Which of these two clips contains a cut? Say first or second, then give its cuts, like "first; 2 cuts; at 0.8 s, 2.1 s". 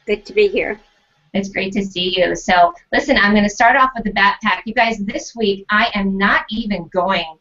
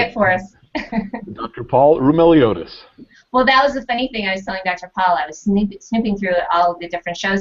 first; 1 cut; at 3.4 s